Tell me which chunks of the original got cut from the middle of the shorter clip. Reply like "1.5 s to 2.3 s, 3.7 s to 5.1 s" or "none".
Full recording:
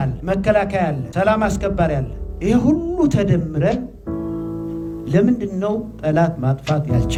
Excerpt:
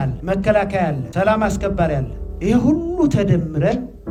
none